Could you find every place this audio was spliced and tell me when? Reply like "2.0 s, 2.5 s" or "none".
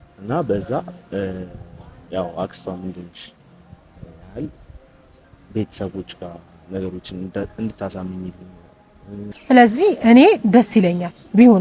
9.3 s